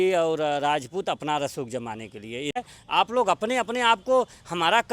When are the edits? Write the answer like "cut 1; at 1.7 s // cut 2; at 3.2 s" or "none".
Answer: cut 1; at 2.6 s